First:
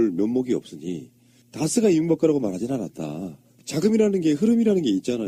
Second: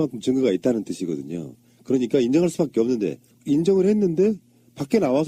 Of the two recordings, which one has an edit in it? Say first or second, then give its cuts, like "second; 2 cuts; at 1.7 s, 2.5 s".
second; 1 cut; at 3.6 s